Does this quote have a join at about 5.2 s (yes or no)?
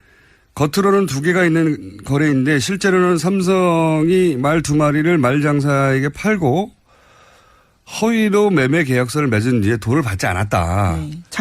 yes